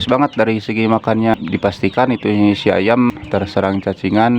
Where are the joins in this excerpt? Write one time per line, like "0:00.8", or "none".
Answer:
0:01.4
0:03.2